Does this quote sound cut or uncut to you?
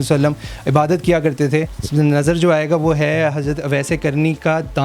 cut